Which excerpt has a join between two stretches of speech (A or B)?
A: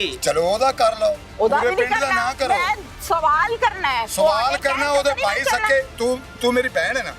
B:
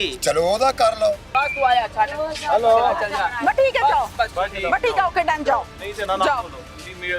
B